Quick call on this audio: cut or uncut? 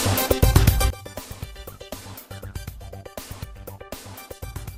uncut